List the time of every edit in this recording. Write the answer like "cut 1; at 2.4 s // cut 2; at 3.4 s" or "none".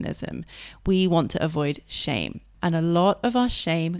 cut 1; at 2.5 s